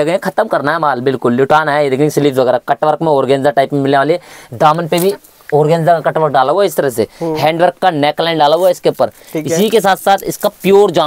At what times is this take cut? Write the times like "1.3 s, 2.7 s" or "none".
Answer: none